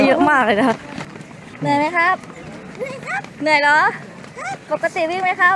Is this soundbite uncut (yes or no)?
no